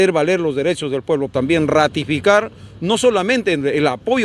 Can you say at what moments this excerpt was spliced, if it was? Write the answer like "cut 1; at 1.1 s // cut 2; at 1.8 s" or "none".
cut 1; at 1.3 s